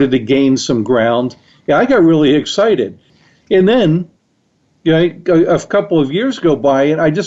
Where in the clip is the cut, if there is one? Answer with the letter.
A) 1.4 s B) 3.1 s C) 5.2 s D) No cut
B